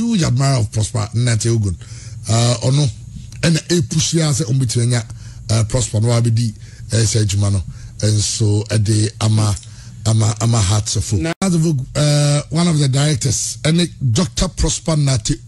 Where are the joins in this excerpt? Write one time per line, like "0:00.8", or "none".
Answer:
0:11.4

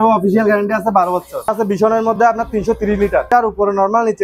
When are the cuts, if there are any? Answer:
0:01.5
0:03.3

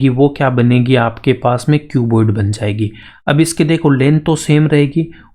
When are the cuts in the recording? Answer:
none

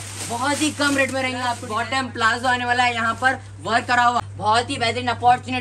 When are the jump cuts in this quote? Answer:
0:01.6
0:04.2

